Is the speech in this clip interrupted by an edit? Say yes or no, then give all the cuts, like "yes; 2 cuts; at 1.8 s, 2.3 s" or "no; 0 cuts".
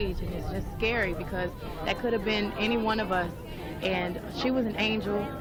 no; 0 cuts